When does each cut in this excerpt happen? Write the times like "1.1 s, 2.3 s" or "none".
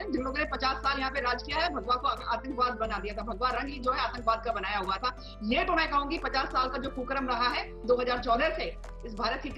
none